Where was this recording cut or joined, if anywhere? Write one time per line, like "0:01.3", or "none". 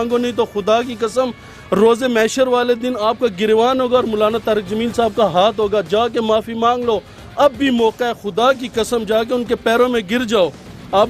none